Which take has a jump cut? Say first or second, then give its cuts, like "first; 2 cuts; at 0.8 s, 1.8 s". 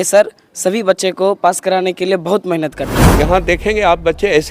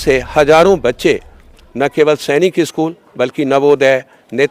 first; 1 cut; at 3.0 s